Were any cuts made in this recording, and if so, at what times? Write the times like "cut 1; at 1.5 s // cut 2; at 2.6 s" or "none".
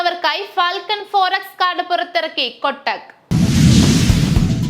cut 1; at 3.2 s

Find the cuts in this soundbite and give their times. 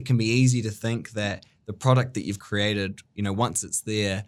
cut 1; at 2.4 s

